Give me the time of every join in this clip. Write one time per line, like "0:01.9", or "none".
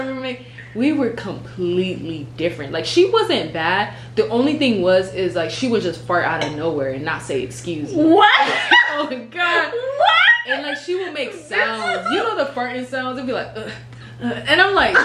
none

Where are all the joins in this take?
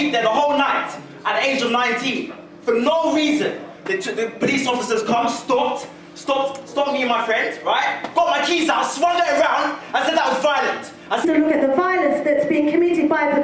none

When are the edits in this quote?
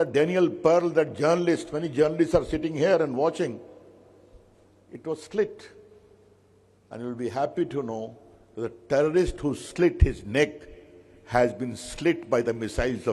none

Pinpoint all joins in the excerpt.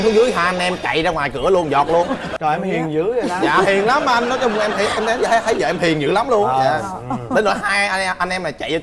0:02.3

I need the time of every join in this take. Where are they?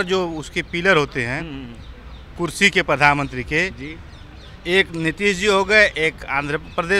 none

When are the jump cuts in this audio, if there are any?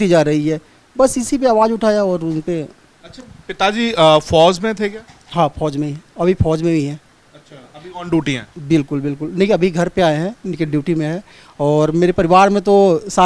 none

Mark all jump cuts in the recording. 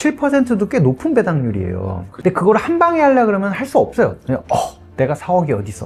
none

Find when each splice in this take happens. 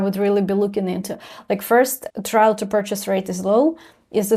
0:02.0

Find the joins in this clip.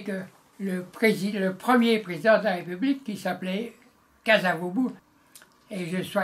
0:05.1

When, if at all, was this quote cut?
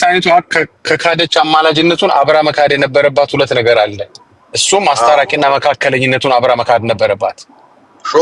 none

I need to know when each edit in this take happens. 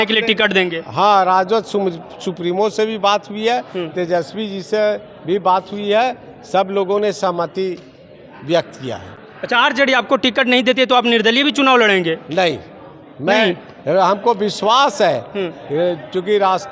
none

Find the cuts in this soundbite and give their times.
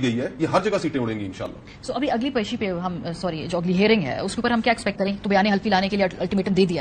none

